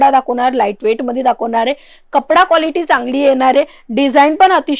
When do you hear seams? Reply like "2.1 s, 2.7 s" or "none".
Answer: none